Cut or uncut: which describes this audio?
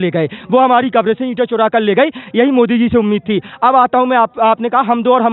uncut